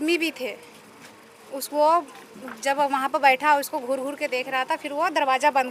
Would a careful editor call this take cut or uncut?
uncut